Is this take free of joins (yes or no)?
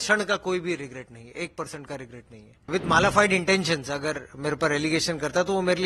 no